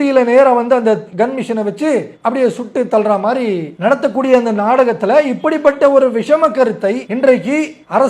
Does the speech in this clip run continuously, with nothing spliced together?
no; 3 cuts; at 1.1 s, 2.1 s, 3.7 s

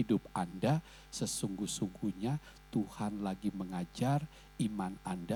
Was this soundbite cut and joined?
no; 0 cuts

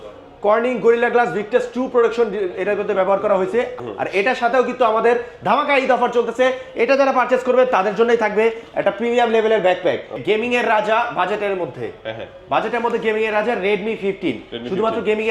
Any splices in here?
yes; 2 cuts; at 3.8 s, 10.2 s

